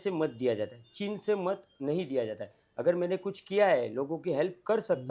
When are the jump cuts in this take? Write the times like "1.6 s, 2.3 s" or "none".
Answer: none